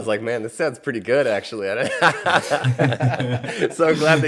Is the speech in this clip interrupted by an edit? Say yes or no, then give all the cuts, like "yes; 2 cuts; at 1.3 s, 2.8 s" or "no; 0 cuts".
no; 0 cuts